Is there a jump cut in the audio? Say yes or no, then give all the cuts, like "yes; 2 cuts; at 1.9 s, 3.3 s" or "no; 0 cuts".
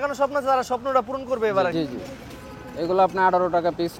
yes; 1 cut; at 1.7 s